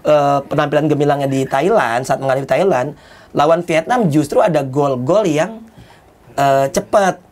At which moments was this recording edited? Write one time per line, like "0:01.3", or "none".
none